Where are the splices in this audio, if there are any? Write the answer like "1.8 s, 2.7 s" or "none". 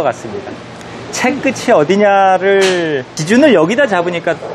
3.1 s